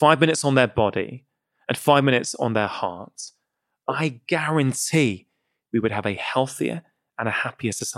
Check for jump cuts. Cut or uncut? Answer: uncut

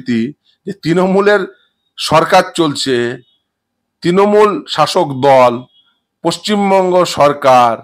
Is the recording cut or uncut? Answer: uncut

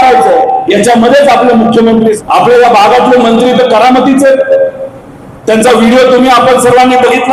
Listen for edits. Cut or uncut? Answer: cut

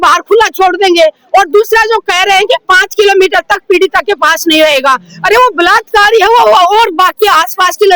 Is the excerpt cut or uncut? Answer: uncut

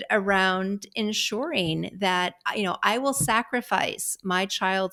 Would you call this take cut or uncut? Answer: uncut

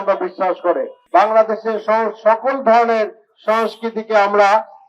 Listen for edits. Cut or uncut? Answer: cut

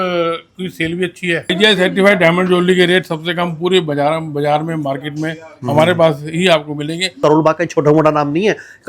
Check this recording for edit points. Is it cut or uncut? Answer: cut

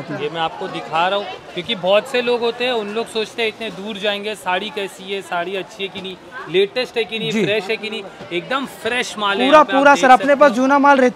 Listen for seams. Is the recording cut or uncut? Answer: uncut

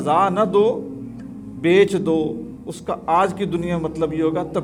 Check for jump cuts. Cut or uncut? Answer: uncut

